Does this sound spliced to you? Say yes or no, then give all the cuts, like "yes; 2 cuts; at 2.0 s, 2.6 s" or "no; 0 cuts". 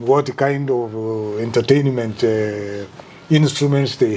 no; 0 cuts